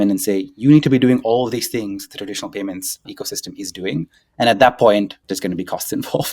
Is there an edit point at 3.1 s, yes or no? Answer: yes